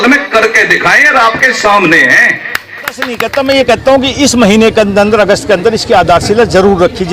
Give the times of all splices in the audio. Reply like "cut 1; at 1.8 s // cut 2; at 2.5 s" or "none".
cut 1; at 3.2 s